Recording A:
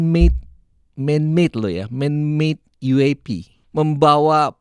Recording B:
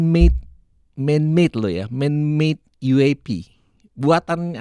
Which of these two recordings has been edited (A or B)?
A